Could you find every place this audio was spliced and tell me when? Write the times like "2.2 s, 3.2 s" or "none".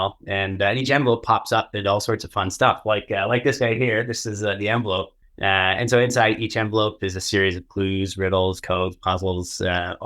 5.2 s